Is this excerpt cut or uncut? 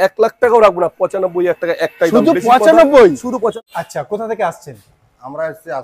cut